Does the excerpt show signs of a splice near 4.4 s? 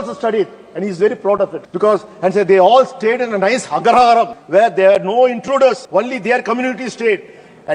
yes; 3 cuts; at 1.6 s, 4.4 s, 5.8 s

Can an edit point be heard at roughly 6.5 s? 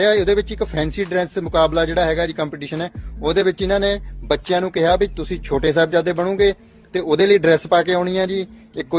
no; 0 cuts

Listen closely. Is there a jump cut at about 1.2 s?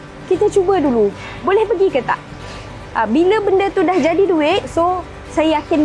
no; 1 cut; at 4.6 s

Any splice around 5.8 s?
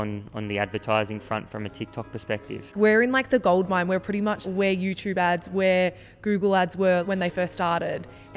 no; 3 cuts; at 2.7 s, 4.4 s, 7.0 s

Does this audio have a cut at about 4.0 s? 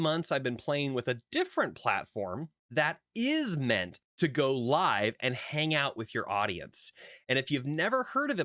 yes; 2 cuts; at 2.5 s, 4.0 s

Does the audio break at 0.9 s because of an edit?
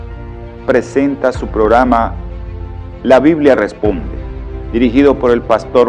yes; 1 cut; at 0.9 s

